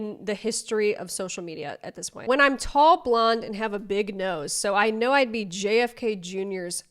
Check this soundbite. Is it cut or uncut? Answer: cut